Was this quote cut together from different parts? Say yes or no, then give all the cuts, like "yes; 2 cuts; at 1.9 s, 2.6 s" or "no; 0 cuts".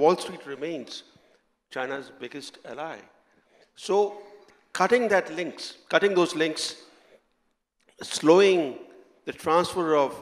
no; 0 cuts